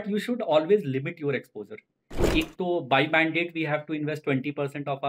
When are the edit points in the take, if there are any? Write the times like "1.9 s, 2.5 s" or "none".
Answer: 2.1 s